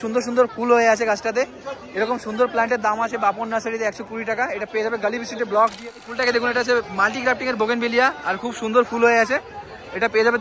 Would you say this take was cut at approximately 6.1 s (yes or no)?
yes